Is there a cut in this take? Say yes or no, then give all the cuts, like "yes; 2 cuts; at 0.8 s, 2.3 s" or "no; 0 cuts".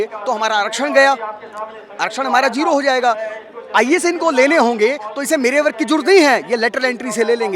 no; 0 cuts